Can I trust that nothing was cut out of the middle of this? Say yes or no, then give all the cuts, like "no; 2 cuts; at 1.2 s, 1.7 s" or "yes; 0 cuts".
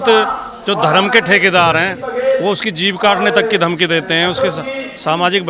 yes; 0 cuts